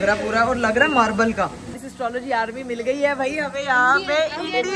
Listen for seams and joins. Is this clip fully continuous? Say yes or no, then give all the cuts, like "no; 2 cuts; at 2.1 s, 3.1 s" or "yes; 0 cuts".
no; 1 cut; at 1.8 s